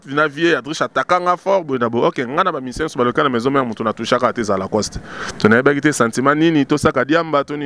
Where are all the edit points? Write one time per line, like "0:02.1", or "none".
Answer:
none